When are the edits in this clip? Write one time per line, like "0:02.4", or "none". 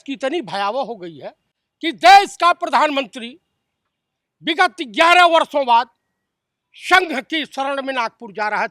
none